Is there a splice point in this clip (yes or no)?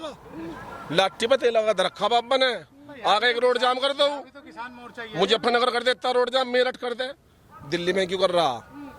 no